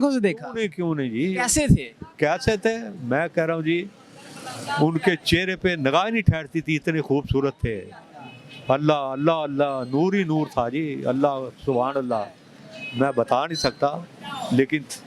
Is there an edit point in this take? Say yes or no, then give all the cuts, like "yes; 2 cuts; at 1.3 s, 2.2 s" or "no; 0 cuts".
no; 0 cuts